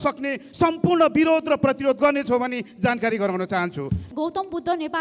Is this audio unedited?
no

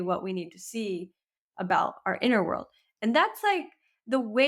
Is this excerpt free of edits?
yes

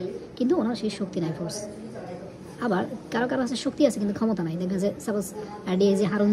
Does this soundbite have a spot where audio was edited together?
no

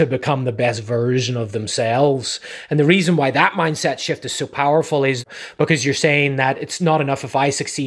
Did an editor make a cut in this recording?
yes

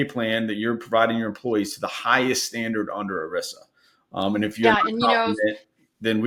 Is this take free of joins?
yes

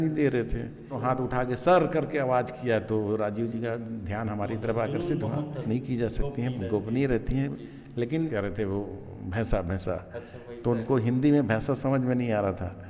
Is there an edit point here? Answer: yes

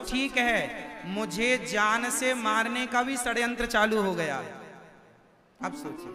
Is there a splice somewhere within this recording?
no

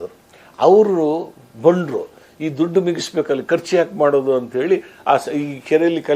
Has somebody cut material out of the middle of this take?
no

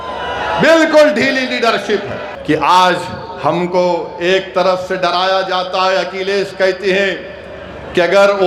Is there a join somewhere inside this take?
yes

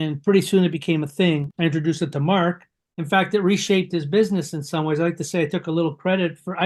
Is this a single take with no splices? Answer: no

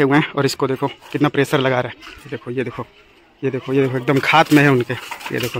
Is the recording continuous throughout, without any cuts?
yes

